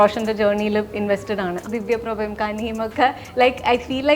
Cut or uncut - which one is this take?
cut